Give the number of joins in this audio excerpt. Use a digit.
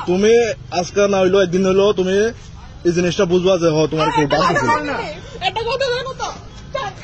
0